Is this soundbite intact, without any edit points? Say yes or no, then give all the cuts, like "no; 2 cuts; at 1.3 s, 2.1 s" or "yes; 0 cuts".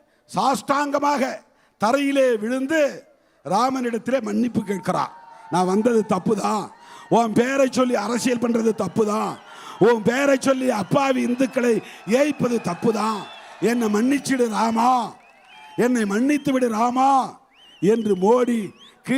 yes; 0 cuts